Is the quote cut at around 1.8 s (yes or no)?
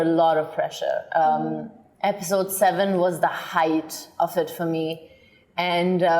no